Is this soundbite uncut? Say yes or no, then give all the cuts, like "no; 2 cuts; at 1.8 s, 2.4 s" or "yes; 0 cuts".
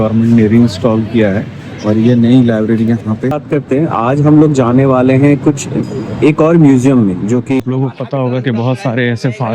no; 2 cuts; at 3.4 s, 7.6 s